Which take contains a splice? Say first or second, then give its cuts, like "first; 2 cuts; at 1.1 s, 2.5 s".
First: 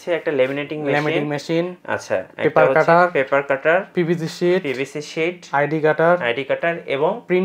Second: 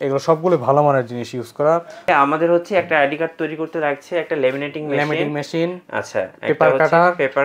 second; 1 cut; at 2.1 s